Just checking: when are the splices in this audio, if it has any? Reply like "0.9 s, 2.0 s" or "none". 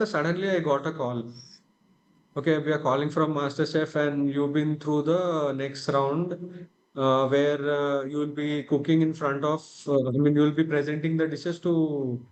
none